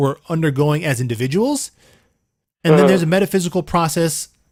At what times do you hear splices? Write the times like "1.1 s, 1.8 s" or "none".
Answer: none